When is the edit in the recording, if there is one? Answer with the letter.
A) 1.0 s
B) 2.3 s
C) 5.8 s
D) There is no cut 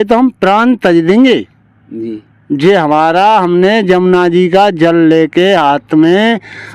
D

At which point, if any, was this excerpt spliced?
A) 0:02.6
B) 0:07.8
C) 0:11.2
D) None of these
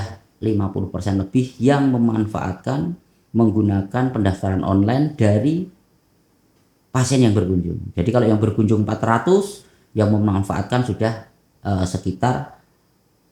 D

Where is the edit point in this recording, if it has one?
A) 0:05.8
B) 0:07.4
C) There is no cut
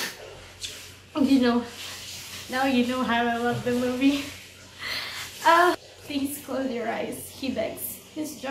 A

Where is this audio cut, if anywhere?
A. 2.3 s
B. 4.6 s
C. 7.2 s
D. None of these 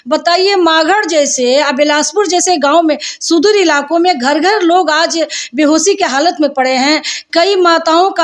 D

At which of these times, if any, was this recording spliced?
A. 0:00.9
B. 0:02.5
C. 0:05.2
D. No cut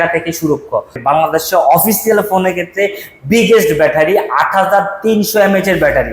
A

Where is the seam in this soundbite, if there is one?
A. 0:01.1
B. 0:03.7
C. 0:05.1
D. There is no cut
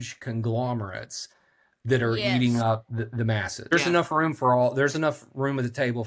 B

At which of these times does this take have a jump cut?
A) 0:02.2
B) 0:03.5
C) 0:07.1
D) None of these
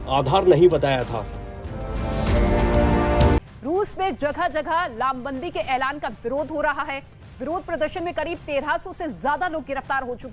B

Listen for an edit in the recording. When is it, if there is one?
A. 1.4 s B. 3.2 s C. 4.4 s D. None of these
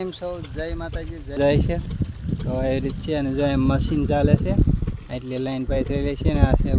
A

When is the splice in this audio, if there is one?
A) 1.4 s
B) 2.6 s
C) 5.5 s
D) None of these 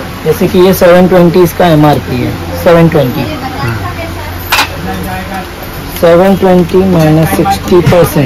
D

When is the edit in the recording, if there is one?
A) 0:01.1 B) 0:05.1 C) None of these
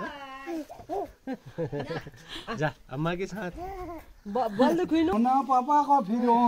B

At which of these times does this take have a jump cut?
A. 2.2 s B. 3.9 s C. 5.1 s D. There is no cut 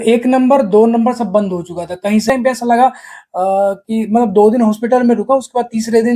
A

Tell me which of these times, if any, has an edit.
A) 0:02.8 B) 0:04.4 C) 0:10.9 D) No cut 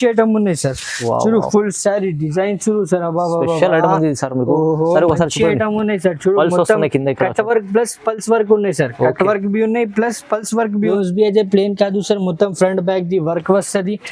C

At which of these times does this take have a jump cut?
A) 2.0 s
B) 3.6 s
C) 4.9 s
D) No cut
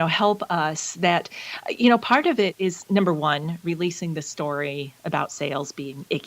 D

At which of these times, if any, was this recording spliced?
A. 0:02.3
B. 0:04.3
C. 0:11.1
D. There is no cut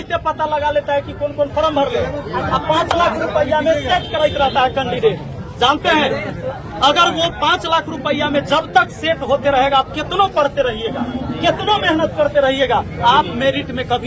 D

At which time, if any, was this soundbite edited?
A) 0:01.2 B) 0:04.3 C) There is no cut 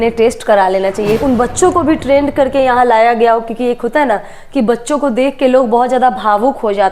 A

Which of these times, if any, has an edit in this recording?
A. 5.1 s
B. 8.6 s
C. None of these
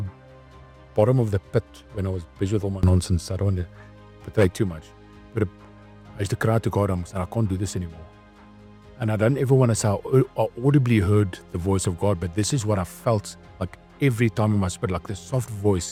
C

